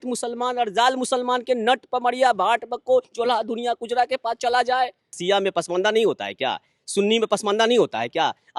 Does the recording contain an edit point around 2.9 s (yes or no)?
no